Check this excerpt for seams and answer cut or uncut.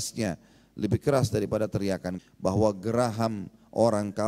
cut